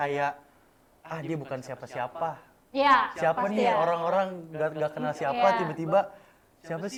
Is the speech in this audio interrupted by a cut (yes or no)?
no